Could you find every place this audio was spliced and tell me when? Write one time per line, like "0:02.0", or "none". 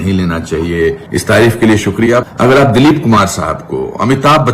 0:01.0
0:02.2